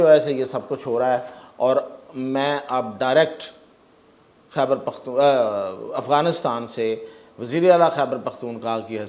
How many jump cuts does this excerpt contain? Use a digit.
0